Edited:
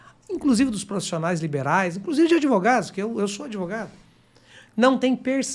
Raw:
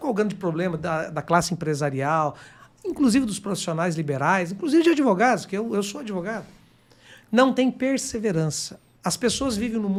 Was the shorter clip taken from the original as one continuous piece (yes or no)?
yes